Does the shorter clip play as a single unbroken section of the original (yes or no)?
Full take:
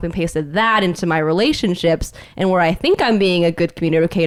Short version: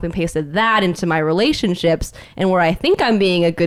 yes